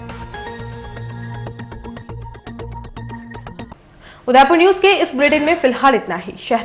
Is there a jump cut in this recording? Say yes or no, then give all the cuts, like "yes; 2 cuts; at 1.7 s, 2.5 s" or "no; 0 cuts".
no; 0 cuts